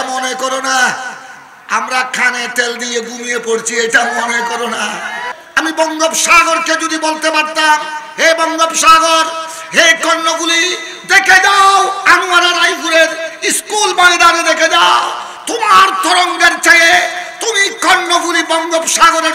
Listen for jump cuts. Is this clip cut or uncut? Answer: cut